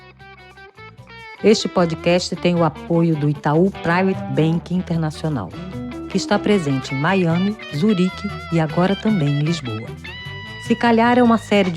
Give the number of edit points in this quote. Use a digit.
1